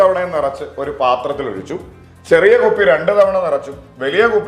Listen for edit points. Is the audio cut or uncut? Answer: uncut